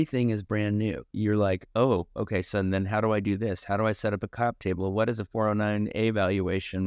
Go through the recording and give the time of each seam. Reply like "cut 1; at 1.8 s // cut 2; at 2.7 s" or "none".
none